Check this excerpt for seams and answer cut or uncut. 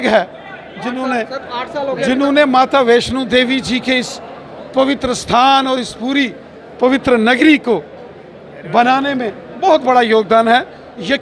uncut